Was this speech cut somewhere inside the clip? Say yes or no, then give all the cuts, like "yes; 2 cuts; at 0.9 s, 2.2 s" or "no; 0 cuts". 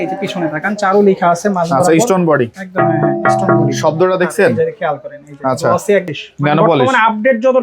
yes; 1 cut; at 6.1 s